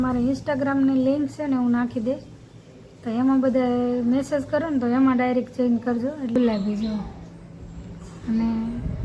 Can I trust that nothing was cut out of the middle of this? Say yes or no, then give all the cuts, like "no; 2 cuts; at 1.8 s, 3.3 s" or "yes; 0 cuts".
no; 1 cut; at 6.4 s